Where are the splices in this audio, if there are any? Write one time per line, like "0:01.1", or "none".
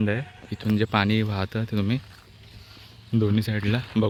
none